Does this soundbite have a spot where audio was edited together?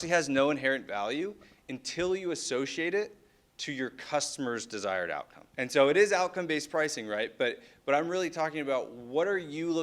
no; 0 cuts

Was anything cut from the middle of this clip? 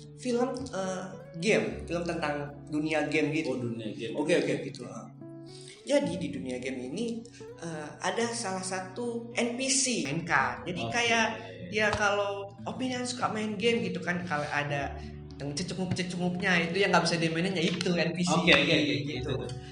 yes; 1 cut; at 10.1 s

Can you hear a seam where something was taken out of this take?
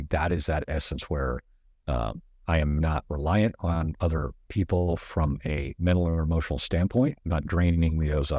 yes; 2 cuts; at 5.7 s, 7.2 s

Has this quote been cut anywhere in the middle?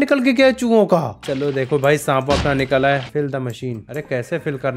yes; 1 cut; at 3.1 s

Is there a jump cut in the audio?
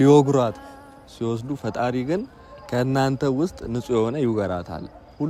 no; 0 cuts

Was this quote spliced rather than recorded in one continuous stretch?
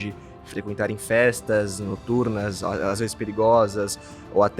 no; 0 cuts

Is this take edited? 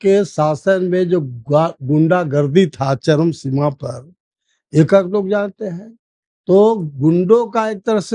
no; 0 cuts

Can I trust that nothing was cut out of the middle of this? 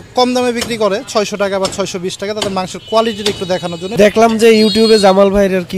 no; 1 cut; at 3.9 s

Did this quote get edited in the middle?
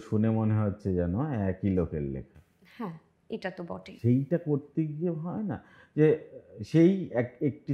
no; 0 cuts

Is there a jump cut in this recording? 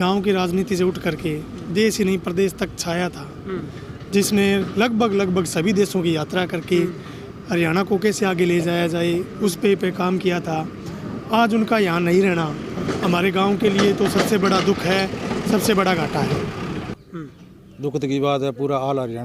yes; 1 cut; at 16.9 s

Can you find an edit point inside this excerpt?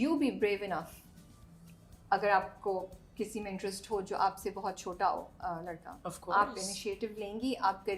no; 0 cuts

